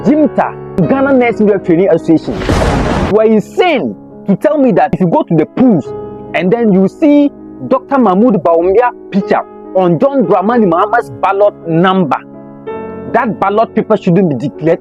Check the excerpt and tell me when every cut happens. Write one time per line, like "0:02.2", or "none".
0:03.1
0:04.9